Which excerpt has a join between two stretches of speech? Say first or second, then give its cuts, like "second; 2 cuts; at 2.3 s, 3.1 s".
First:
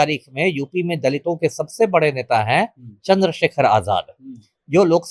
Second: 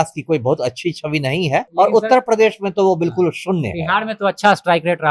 second; 1 cut; at 1.7 s